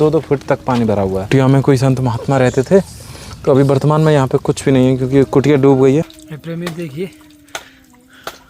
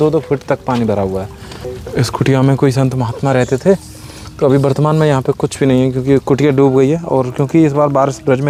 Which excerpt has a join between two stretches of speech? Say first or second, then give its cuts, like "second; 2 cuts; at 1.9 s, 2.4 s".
first; 2 cuts; at 1.3 s, 6.1 s